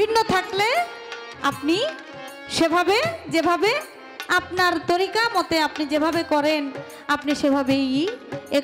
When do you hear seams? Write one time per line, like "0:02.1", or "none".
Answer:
none